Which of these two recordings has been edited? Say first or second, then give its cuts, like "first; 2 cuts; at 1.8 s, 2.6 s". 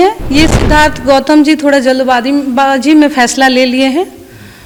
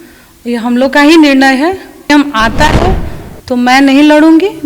second; 1 cut; at 2.1 s